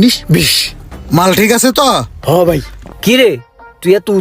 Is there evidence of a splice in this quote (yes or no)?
yes